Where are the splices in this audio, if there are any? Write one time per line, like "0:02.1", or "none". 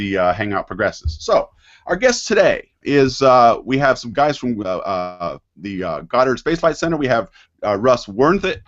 0:03.6